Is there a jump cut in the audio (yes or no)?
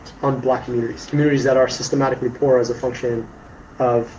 yes